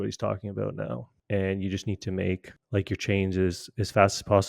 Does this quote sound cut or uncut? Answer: cut